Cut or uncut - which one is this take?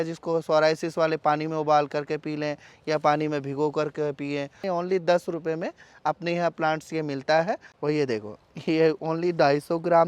cut